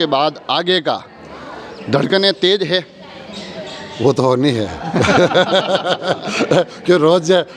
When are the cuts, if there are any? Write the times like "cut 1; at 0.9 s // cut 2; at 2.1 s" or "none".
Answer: none